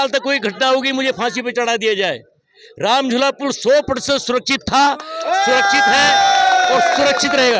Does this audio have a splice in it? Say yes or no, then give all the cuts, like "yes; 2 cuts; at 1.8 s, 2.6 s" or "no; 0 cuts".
no; 0 cuts